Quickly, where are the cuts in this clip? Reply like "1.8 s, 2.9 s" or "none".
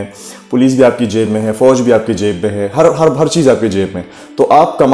none